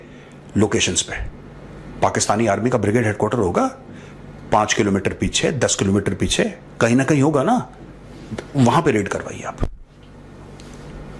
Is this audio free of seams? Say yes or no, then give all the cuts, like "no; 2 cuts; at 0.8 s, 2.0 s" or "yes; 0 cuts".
yes; 0 cuts